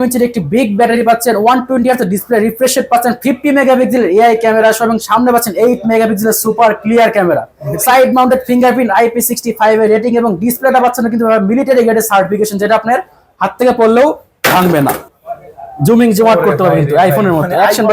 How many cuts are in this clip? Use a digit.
1